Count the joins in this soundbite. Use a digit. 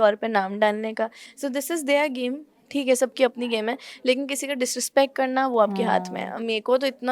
0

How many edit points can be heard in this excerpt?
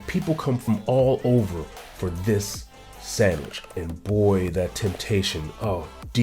1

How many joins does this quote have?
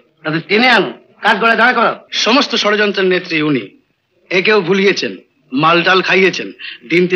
1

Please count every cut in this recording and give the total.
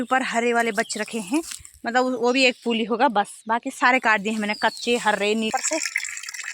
1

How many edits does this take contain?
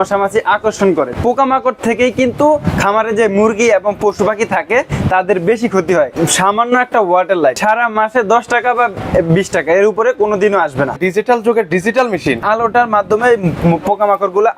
5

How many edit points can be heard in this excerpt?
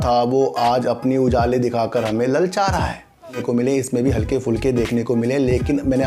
1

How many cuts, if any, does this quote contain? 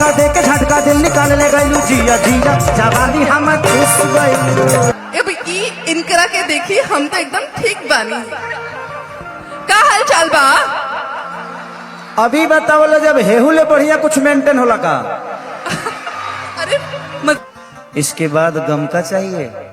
2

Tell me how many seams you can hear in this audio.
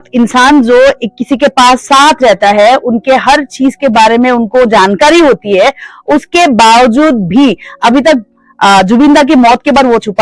0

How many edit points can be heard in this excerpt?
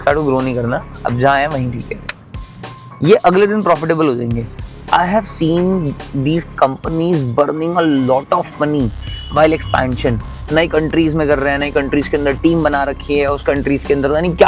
0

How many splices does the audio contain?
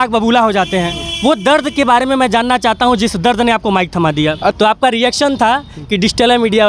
1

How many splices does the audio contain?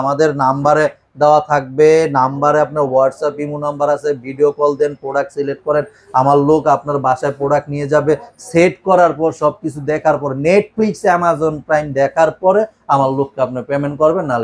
0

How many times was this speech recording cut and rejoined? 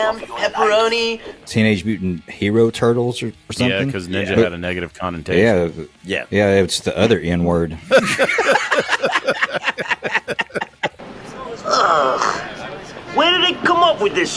3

